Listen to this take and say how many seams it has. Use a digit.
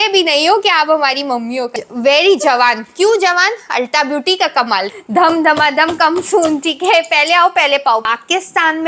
3